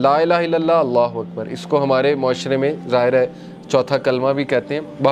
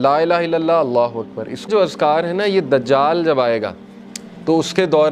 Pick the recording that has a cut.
second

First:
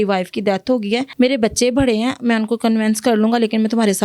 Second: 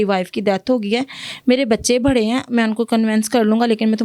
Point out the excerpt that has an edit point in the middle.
first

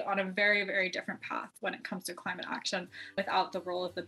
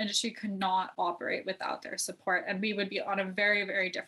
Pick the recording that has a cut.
first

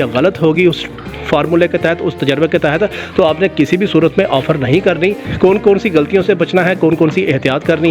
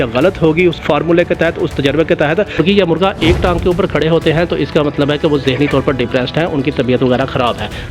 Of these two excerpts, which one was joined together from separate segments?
second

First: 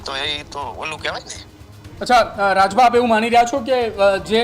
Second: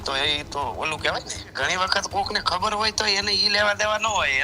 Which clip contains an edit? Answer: second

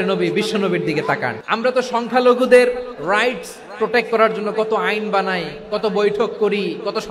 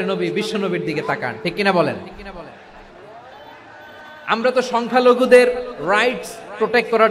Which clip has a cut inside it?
first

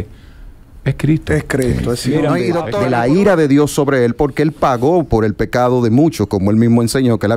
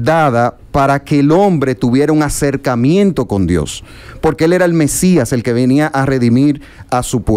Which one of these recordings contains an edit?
first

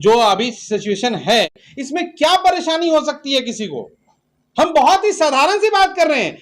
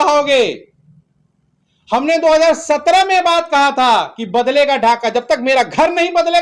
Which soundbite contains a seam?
first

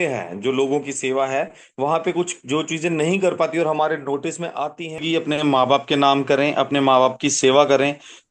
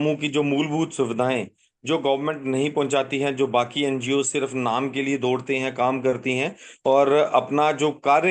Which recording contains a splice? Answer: first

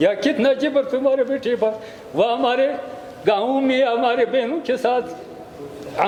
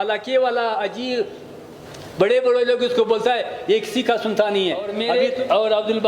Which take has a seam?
second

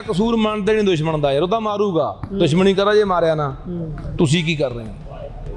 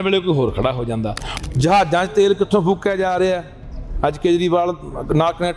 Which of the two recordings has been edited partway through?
second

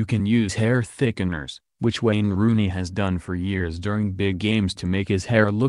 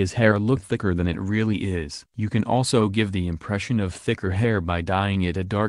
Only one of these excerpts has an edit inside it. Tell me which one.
second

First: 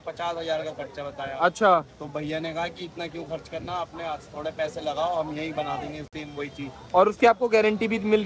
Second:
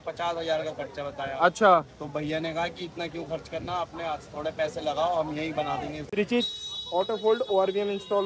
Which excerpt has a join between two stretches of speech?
second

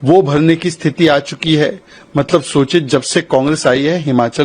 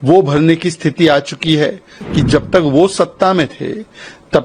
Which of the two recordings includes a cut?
second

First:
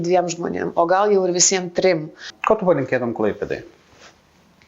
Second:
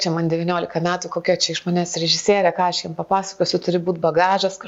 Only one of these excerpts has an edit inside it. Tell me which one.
first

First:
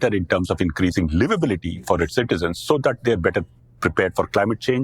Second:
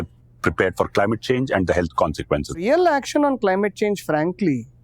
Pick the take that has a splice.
second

